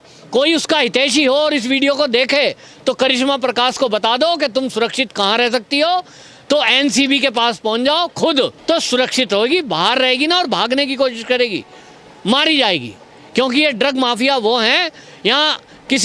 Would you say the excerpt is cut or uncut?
cut